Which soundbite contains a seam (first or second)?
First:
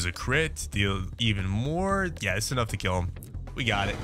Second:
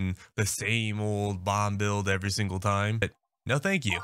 second